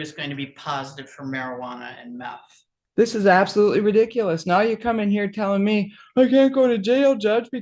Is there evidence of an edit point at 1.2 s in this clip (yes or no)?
no